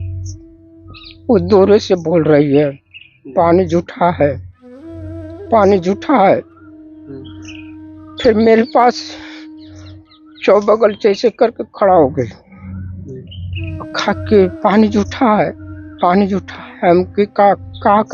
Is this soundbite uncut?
yes; 0 cuts

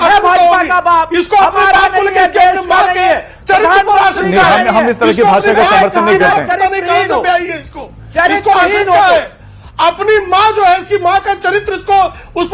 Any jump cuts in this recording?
no; 0 cuts

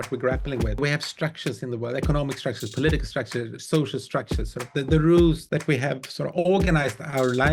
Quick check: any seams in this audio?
yes; 2 cuts; at 0.8 s, 5.4 s

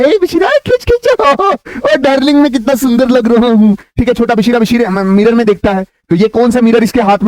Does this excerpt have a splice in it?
no; 0 cuts

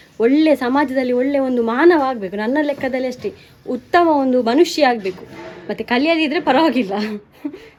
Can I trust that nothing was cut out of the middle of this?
yes; 0 cuts

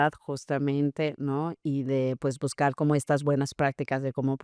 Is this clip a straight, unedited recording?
yes; 0 cuts

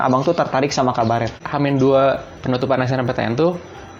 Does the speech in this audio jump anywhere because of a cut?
yes; 1 cut; at 1.4 s

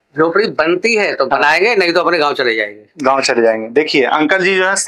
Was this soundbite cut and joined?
no; 0 cuts

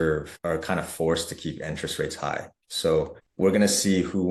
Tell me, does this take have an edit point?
no; 0 cuts

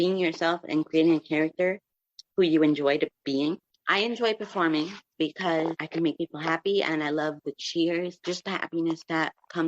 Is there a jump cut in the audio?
no; 0 cuts

